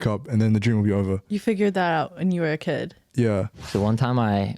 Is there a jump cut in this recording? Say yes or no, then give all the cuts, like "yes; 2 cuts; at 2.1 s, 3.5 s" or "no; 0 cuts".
yes; 1 cut; at 3.6 s